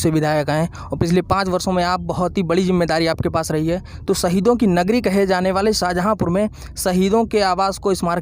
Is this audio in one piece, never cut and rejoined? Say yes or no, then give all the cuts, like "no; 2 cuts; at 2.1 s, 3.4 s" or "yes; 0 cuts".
yes; 0 cuts